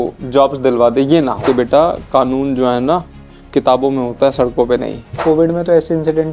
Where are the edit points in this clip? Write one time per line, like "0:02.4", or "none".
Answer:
0:01.4
0:05.2